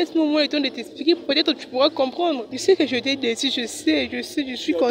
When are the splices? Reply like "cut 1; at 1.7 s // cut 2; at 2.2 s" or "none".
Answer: cut 1; at 2.5 s